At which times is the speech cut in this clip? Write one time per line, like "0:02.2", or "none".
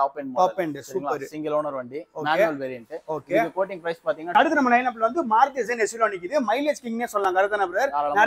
0:04.4